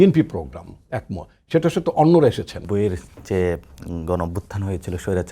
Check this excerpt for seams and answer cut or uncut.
cut